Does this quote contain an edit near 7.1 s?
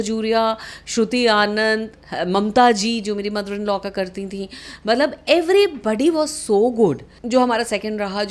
yes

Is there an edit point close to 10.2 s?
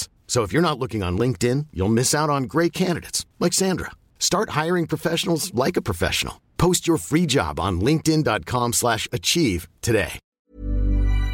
yes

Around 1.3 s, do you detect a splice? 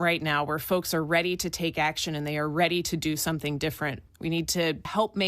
no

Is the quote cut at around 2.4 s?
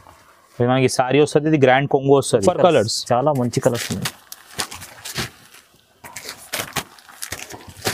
yes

